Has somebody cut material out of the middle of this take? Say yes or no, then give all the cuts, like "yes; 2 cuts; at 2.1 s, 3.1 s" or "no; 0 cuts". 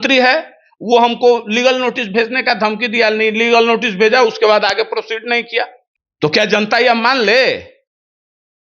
yes; 1 cut; at 5.8 s